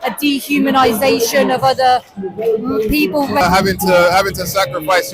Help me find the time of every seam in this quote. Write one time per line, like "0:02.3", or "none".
0:03.4